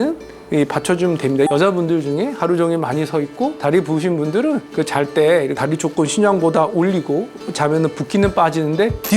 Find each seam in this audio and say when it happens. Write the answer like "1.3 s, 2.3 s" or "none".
1.5 s